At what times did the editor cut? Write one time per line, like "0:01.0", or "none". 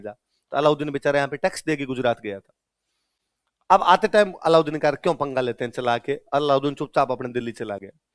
none

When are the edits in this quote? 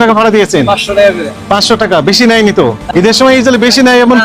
0:02.8

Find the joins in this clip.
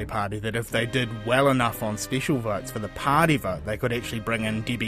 none

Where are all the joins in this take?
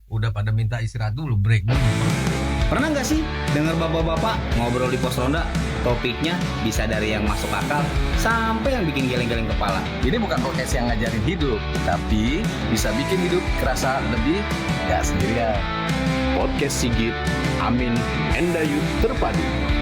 0:01.6

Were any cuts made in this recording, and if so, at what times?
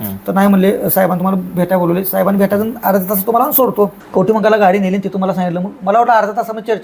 0:04.0

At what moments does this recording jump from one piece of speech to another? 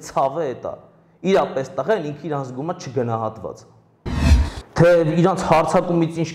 0:04.2

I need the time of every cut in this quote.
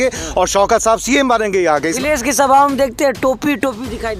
0:01.9

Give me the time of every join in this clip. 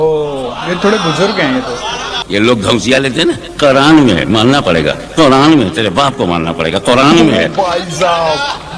0:02.1

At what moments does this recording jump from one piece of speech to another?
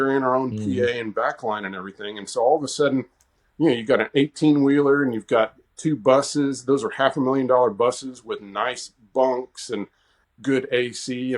none

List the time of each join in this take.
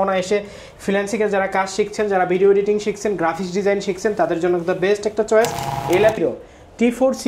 0:06.2

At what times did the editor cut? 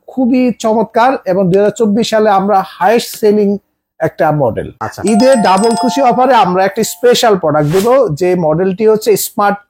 0:04.7

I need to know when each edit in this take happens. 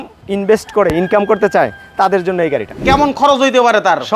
0:02.8

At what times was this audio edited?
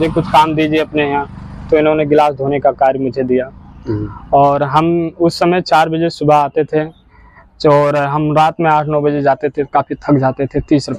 none

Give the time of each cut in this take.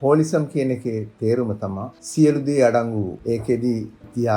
0:03.2

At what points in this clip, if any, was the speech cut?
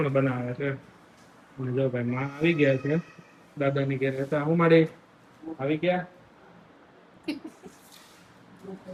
none

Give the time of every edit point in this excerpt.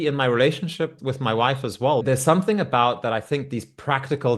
0:00.9
0:02.0

